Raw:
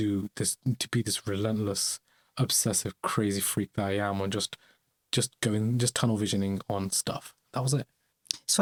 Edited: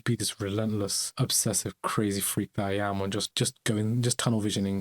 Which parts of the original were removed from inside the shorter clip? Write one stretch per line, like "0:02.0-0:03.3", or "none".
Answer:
0:01.9-0:02.2
0:04.5-0:05.1